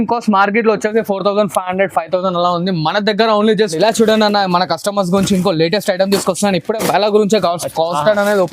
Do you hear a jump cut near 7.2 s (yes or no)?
no